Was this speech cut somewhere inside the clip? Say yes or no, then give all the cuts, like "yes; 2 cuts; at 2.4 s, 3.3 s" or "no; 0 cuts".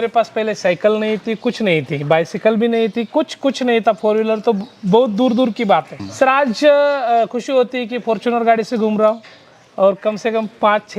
yes; 1 cut; at 6.0 s